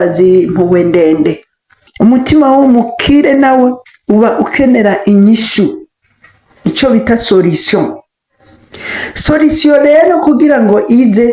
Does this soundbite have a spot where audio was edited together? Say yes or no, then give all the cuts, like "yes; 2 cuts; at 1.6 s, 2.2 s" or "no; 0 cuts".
yes; 1 cut; at 1.8 s